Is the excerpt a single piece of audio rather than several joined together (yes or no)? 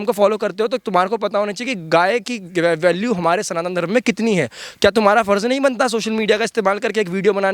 yes